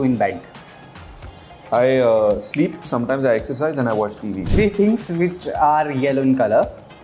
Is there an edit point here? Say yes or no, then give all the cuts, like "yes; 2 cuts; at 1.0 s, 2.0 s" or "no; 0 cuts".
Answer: yes; 1 cut; at 4.4 s